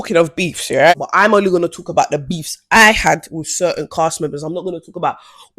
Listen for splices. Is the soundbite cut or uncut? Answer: cut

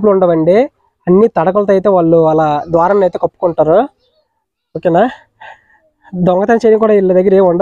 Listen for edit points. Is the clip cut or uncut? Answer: uncut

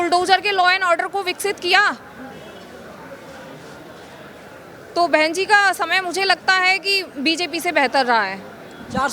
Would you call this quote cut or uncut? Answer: uncut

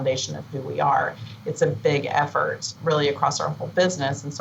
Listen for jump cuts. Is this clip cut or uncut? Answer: uncut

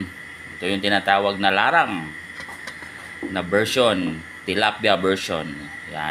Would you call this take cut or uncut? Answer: uncut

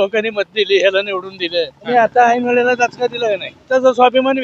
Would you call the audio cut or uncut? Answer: cut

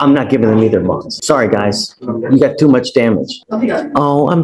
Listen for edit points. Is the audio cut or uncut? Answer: cut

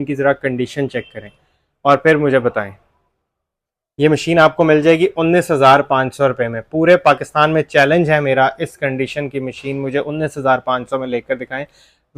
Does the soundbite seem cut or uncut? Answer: uncut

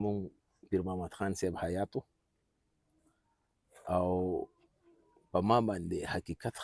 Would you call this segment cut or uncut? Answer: uncut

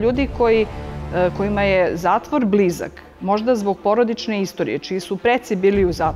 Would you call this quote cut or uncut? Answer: uncut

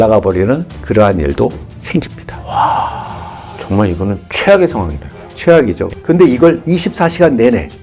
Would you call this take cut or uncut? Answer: cut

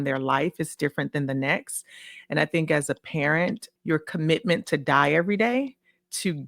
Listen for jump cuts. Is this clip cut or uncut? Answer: cut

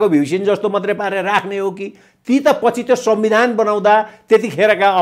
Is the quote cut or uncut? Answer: uncut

